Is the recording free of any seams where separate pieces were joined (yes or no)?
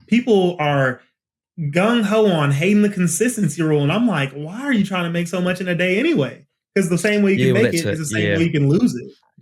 yes